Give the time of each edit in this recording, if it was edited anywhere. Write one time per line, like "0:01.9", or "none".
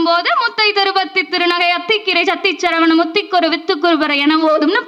none